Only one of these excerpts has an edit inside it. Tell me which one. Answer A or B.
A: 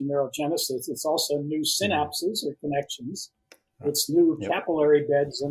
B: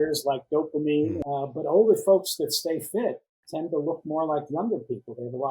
B